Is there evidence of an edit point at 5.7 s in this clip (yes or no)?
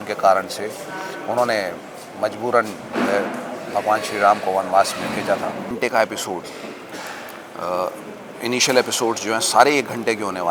yes